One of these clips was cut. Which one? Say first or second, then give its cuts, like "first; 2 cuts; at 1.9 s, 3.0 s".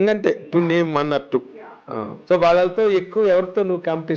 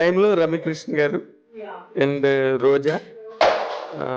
first; 1 cut; at 2.1 s